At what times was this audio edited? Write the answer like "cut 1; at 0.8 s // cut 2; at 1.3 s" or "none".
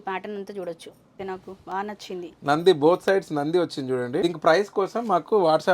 cut 1; at 1.2 s // cut 2; at 4.2 s

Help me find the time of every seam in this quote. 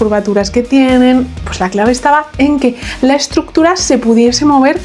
cut 1; at 1.4 s

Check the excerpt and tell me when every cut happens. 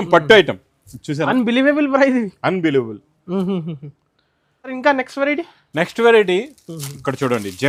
none

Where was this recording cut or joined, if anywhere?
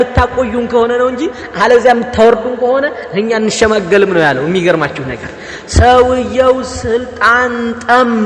none

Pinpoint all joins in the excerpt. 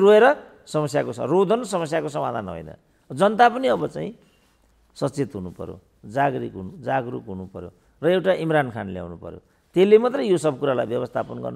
none

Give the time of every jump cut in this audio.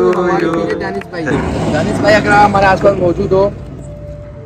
cut 1; at 1.3 s

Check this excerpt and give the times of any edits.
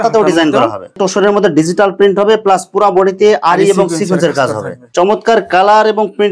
cut 1; at 0.8 s // cut 2; at 4.8 s

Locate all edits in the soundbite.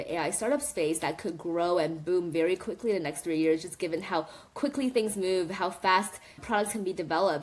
none

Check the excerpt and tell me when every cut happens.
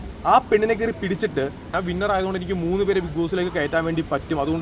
cut 1; at 1.7 s

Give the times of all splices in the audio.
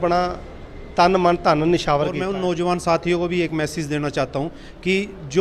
cut 1; at 2.3 s

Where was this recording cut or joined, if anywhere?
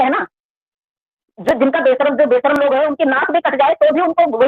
none

